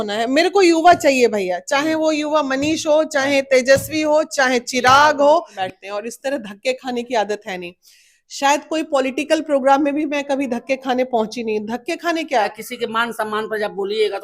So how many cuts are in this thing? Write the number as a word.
two